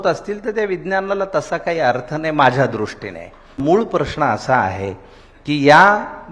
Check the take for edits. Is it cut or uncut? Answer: cut